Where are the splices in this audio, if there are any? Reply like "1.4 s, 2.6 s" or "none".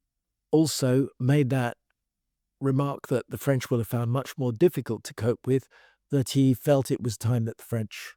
1.2 s